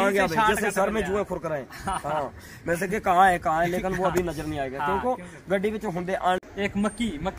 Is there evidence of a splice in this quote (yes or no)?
yes